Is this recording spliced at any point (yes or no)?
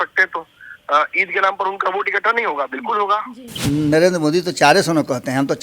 yes